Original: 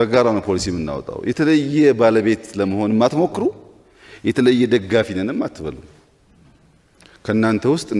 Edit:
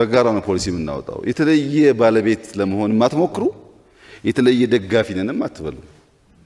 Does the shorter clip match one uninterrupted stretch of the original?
yes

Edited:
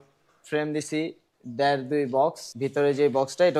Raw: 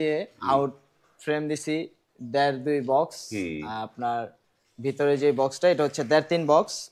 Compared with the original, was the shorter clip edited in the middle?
yes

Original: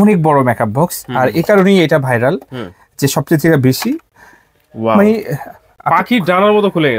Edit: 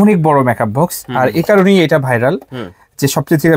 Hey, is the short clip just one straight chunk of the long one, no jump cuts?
yes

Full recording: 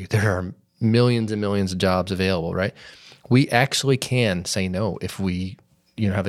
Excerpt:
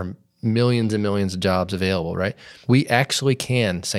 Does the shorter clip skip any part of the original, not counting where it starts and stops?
yes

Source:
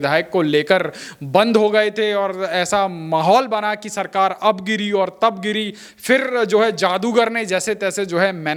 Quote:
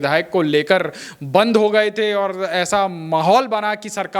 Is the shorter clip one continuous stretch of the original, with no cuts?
yes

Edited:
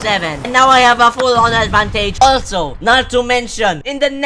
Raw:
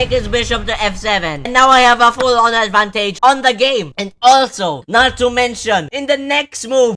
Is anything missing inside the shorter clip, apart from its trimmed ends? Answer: yes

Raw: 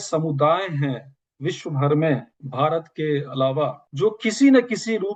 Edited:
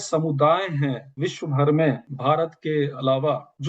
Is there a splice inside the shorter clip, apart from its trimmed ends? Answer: yes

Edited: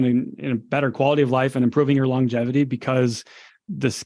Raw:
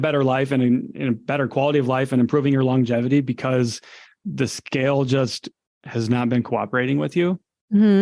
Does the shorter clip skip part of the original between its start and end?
no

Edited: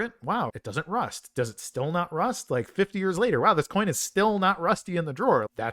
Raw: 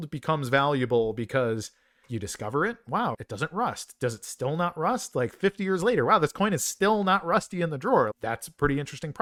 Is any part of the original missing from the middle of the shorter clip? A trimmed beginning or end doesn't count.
no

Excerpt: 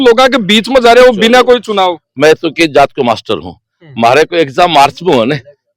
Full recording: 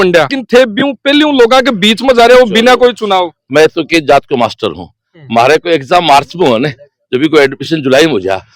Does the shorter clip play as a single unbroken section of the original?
yes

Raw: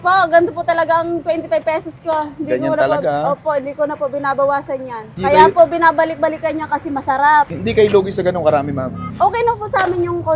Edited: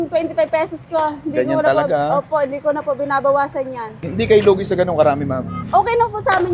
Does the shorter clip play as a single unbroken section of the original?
no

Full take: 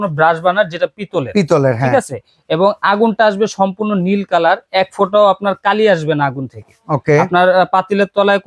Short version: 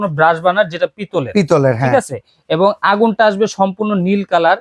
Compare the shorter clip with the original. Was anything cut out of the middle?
no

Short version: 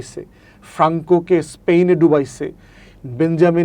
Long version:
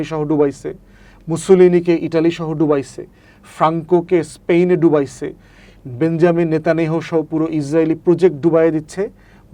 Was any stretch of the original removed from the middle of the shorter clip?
no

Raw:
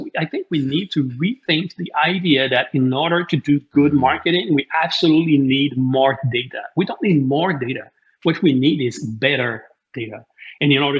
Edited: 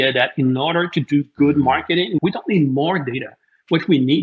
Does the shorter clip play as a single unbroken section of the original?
no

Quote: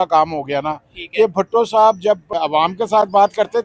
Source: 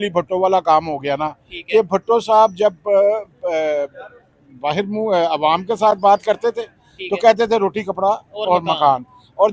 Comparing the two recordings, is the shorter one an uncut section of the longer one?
no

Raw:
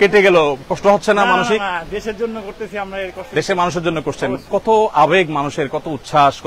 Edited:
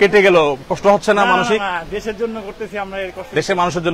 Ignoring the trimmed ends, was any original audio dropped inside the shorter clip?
no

